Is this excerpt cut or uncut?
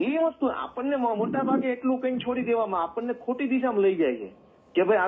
uncut